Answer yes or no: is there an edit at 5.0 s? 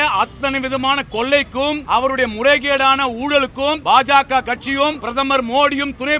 yes